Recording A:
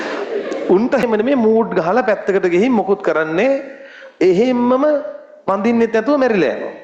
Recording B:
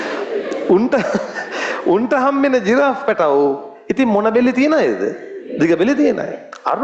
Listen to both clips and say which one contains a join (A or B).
A